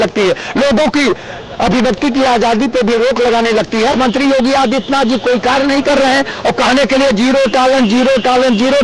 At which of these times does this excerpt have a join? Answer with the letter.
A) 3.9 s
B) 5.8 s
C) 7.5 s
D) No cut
A